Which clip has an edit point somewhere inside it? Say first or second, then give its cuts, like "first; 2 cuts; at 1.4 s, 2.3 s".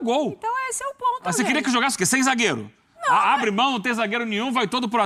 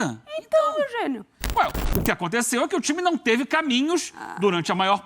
second; 1 cut; at 1.4 s